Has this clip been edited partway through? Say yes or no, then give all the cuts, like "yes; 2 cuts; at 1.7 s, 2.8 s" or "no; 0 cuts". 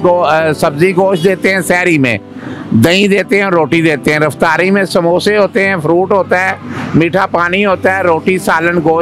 no; 0 cuts